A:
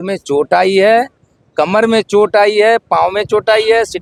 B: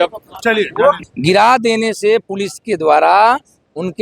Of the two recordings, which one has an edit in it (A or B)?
B